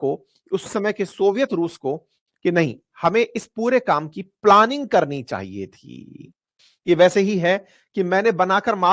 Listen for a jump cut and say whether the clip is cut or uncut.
uncut